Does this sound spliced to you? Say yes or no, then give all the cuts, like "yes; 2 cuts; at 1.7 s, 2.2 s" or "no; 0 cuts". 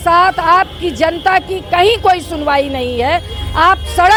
no; 0 cuts